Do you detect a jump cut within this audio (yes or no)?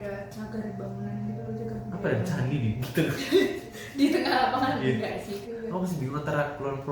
yes